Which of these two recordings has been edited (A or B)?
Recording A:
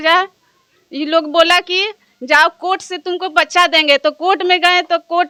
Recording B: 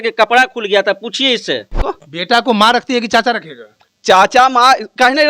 B